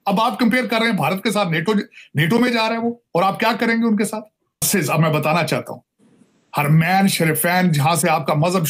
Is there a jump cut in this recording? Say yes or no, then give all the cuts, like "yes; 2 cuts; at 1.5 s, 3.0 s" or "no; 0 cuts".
yes; 1 cut; at 4.7 s